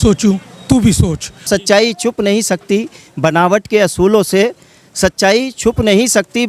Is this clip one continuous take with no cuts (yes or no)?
no